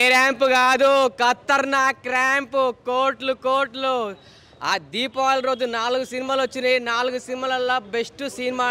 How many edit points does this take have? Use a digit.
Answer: 0